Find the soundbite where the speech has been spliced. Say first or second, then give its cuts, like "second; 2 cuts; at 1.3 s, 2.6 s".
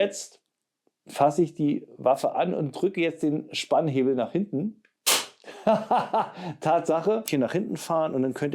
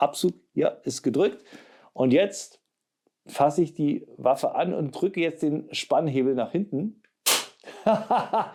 first; 1 cut; at 7.3 s